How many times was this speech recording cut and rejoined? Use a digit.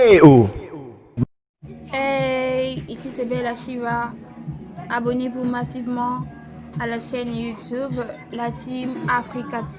1